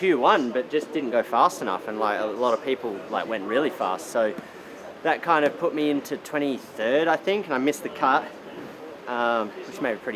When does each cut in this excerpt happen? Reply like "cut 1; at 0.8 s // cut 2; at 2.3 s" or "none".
none